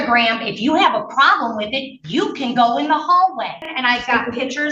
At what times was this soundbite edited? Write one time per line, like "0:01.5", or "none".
0:03.7